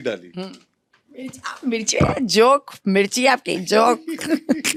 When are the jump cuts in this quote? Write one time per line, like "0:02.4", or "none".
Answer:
none